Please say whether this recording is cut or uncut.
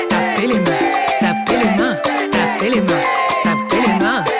uncut